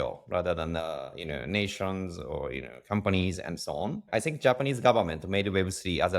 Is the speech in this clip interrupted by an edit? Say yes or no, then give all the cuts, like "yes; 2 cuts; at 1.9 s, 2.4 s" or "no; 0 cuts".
yes; 1 cut; at 4.0 s